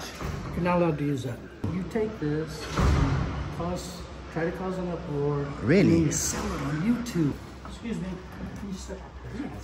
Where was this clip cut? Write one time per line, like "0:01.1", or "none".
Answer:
0:01.7
0:07.4